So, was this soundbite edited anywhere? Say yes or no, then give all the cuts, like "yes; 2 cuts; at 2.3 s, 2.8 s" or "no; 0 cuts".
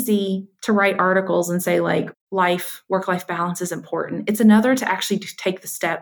no; 0 cuts